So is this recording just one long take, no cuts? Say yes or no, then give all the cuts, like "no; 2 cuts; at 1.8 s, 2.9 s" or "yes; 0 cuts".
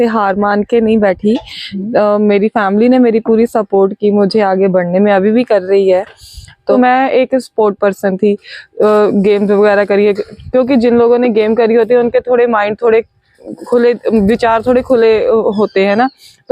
yes; 0 cuts